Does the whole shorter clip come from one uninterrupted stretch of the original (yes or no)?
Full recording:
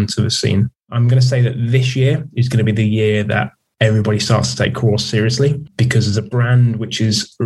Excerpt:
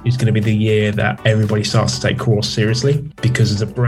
no